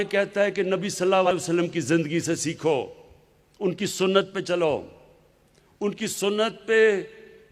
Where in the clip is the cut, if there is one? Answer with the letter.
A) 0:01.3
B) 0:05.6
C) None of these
A